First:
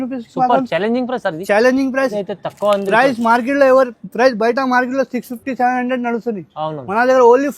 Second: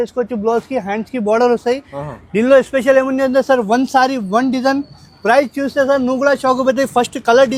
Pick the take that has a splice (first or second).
first